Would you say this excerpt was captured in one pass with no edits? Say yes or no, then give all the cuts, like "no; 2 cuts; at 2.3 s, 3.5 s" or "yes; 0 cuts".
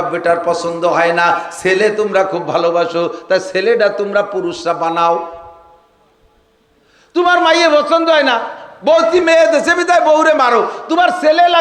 yes; 0 cuts